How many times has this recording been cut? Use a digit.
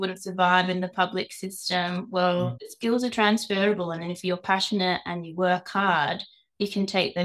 1